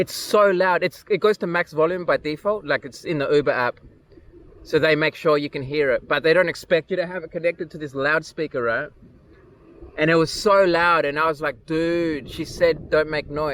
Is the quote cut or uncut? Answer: uncut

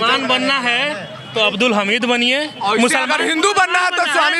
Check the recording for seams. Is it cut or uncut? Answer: uncut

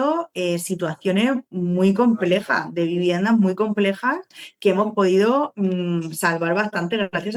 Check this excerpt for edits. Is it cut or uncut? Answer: uncut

